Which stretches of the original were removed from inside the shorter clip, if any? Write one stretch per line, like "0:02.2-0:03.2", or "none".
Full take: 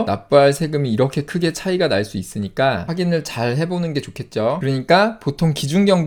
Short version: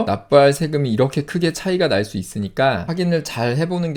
none